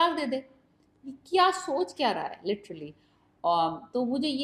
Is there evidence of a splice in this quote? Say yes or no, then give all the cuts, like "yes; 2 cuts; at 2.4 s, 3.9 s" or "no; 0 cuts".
no; 0 cuts